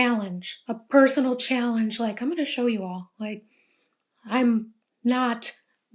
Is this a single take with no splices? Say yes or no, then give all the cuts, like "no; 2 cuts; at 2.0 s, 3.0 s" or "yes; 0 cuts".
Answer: yes; 0 cuts